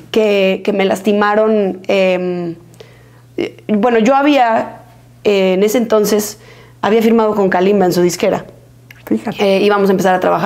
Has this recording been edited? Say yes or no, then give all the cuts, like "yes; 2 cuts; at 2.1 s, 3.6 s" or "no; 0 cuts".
no; 0 cuts